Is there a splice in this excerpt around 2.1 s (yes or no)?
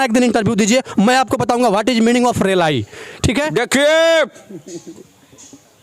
no